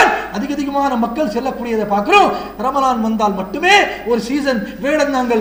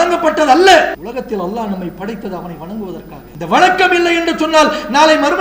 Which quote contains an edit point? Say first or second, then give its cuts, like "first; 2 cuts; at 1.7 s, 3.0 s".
second; 2 cuts; at 1.0 s, 3.2 s